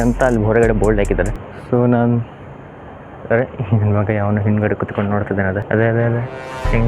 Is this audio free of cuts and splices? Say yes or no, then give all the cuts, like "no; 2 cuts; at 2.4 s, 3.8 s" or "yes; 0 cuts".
no; 2 cuts; at 1.3 s, 5.6 s